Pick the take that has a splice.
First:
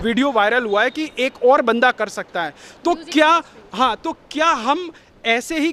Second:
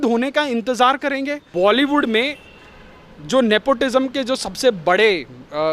second; 1 cut; at 1.4 s

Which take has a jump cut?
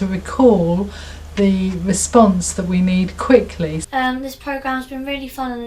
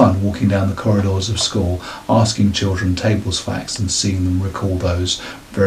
first; 1 cut; at 3.8 s

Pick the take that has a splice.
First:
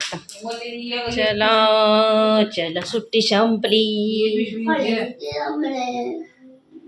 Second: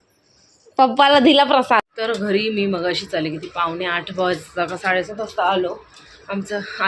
second; 1 cut; at 1.8 s

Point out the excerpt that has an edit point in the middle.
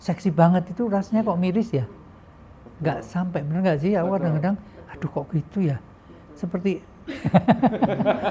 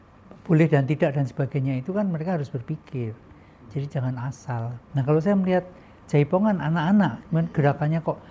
second; 1 cut; at 4.8 s

